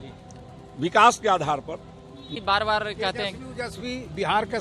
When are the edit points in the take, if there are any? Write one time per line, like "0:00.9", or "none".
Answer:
0:02.3